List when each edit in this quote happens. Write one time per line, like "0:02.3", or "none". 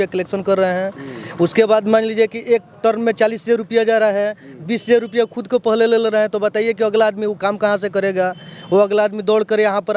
none